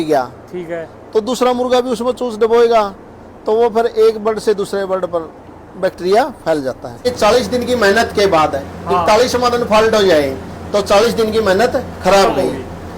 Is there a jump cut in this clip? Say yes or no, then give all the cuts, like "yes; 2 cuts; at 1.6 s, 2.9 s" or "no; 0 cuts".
yes; 1 cut; at 7.1 s